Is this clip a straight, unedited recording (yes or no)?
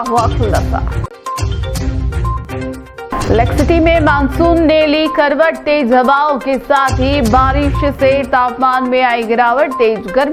yes